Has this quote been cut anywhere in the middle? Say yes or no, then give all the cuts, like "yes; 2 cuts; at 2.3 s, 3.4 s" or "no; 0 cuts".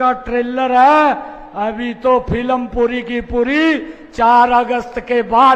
no; 0 cuts